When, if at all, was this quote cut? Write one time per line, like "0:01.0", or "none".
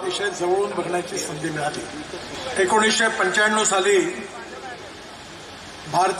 0:02.3